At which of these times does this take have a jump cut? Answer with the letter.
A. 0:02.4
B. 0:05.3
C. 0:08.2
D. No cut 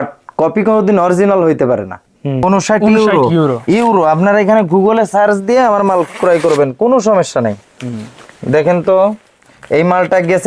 A